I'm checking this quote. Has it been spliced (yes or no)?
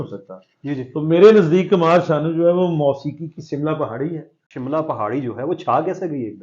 yes